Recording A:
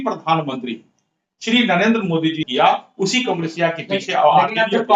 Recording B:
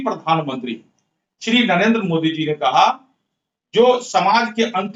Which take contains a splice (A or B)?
A